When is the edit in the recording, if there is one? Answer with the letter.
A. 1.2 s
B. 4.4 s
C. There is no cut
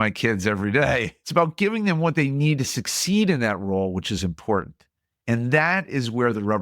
A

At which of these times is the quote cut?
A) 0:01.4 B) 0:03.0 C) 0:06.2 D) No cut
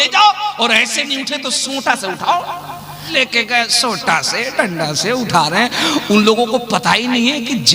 B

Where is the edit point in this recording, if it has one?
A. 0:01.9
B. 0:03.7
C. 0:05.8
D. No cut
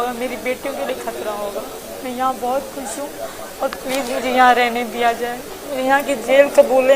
D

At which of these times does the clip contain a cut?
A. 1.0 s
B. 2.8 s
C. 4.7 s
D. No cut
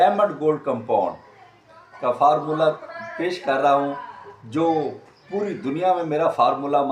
D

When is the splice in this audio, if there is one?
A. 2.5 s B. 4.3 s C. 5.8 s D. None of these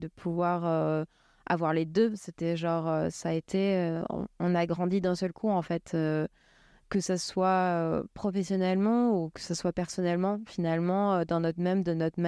D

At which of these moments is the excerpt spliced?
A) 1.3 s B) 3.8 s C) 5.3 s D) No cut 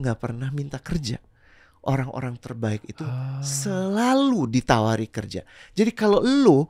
D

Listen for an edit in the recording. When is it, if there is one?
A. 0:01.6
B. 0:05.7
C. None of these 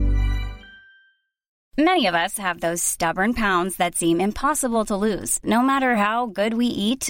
A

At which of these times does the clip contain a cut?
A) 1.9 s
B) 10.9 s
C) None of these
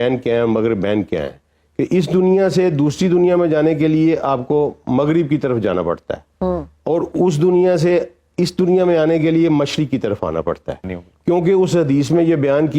B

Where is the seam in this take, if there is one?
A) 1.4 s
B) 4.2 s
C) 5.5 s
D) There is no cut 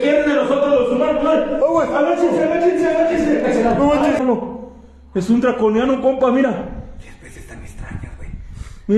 B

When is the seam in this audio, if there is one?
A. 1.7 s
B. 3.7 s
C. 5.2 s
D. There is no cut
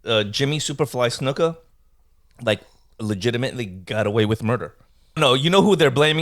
C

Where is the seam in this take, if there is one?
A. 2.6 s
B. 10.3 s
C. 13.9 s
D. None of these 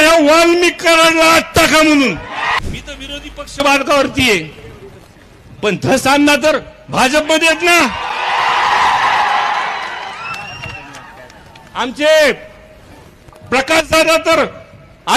A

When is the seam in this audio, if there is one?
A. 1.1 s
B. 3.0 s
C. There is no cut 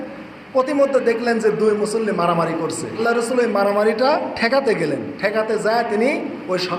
B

